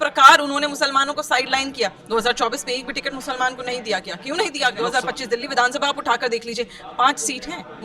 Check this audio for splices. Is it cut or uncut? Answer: cut